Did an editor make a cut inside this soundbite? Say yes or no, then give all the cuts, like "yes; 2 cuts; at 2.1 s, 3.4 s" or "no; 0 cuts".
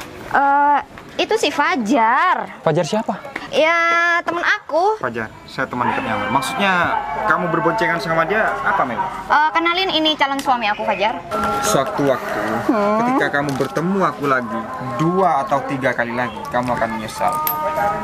yes; 4 cuts; at 2.5 s, 3.3 s, 5.0 s, 11.3 s